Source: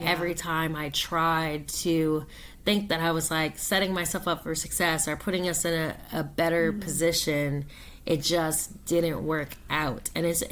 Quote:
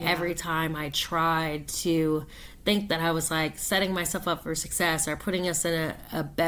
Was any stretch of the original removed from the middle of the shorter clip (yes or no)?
no